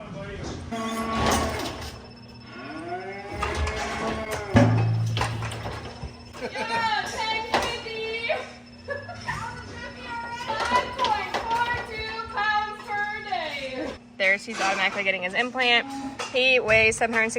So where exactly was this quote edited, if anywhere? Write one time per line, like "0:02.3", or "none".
0:00.7
0:14.0